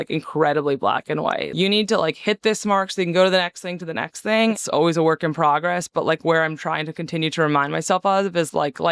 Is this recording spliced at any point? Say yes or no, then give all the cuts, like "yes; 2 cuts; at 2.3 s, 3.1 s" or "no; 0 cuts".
yes; 2 cuts; at 1.5 s, 4.6 s